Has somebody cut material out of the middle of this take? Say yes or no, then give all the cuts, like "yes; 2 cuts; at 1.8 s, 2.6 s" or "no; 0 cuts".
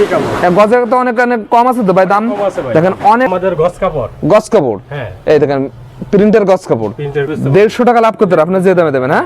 yes; 2 cuts; at 3.3 s, 7.3 s